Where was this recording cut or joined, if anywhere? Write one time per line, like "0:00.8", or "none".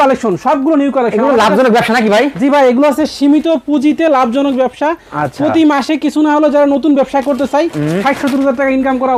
none